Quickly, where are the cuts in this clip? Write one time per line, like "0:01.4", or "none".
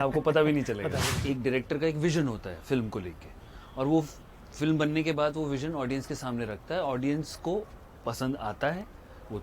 0:01.1